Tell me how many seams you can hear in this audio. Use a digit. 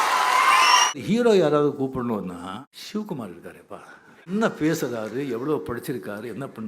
3